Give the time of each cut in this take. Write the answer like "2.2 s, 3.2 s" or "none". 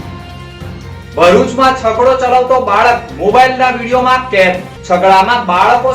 none